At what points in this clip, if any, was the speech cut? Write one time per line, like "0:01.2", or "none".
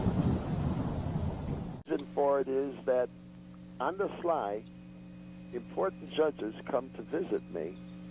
0:01.6